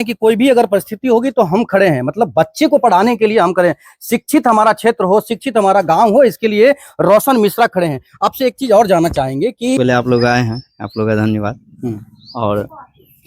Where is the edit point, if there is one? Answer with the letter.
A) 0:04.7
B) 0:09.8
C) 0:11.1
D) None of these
B